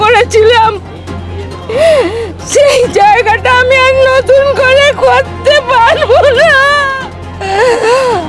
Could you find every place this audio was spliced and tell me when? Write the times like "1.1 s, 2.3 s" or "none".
6.9 s